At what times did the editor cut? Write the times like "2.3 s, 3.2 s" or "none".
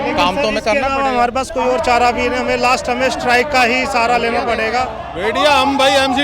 5.0 s

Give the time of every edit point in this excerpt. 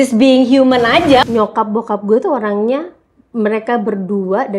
1.3 s

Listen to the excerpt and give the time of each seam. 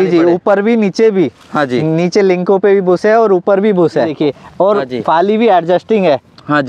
4.1 s

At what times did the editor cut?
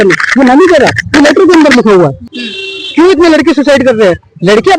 2.2 s

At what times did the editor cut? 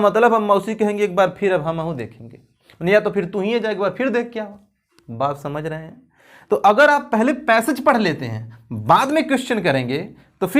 none

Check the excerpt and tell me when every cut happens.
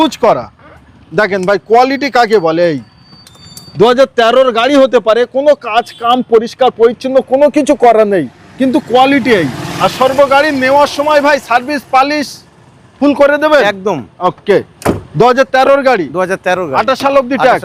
none

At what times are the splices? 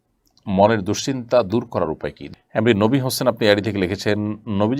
2.2 s

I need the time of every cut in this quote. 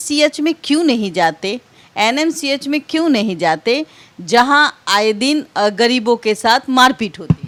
none

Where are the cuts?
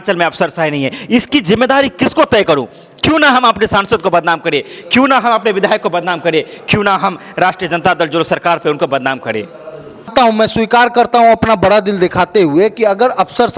10.1 s

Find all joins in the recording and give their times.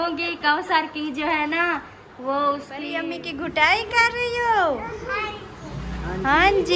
2.9 s

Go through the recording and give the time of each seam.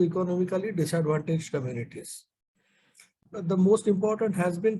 3.2 s

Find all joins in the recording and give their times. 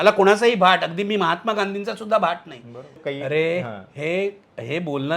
3.0 s

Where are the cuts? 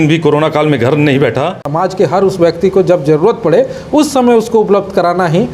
1.7 s

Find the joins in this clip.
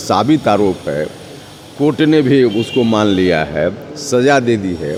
none

